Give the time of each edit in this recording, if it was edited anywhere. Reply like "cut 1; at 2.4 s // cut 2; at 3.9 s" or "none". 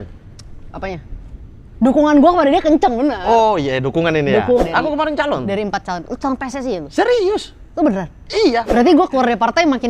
cut 1; at 4.6 s // cut 2; at 8.7 s